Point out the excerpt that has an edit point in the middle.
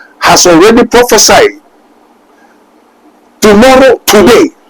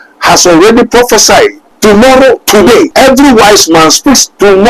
second; 2 cuts; at 1.7 s, 2.9 s

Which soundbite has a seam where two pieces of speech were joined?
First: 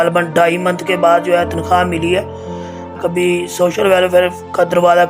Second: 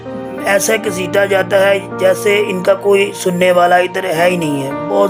first; 1 cut; at 3.0 s

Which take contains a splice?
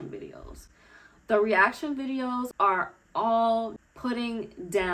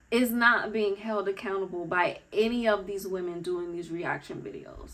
first; 2 cuts; at 2.5 s, 3.8 s

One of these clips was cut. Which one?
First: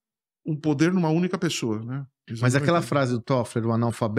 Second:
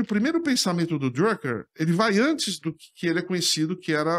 first; 1 cut; at 2.2 s

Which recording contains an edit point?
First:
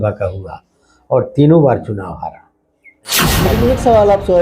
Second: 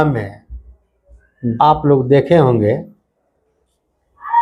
first; 1 cut; at 3.4 s

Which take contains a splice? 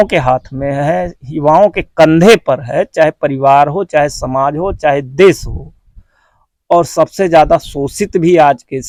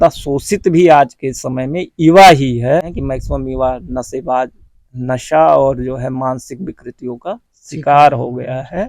second; 1 cut; at 2.9 s

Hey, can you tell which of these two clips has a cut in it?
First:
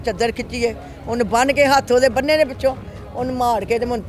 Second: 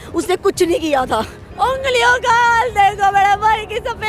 second; 1 cut; at 1.4 s

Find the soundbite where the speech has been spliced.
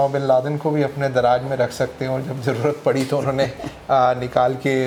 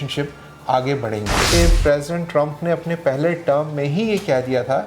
second; 1 cut; at 1.5 s

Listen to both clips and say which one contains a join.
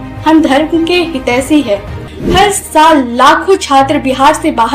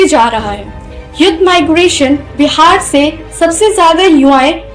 first; 1 cut; at 2.0 s

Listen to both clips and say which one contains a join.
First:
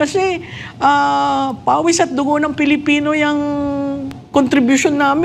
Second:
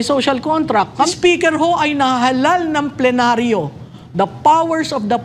second; 1 cut; at 1.1 s

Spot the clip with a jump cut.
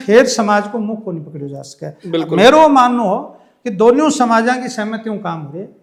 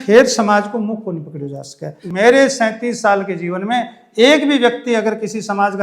second; 1 cut; at 2.0 s

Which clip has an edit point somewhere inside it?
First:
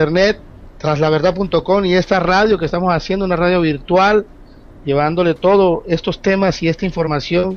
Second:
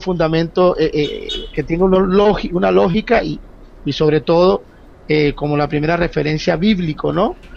second; 1 cut; at 1.3 s

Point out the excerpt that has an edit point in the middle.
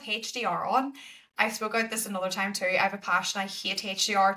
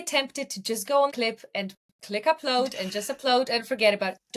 second; 1 cut; at 1.5 s

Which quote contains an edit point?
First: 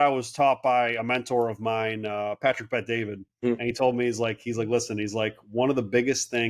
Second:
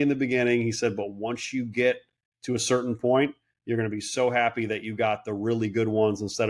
first; 1 cut; at 3.4 s

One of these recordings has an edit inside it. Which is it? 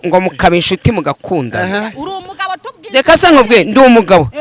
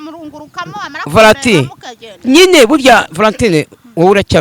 first; 1 cut; at 2.0 s

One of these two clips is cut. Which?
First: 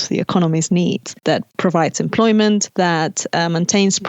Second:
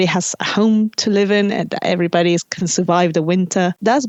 first; 2 cuts; at 1.2 s, 2.7 s

